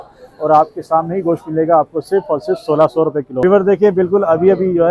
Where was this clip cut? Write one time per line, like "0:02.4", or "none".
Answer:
0:03.3